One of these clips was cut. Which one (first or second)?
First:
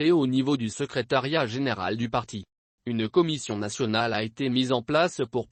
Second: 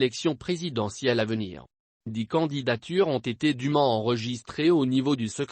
second